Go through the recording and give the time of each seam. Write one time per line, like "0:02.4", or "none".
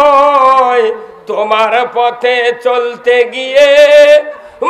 none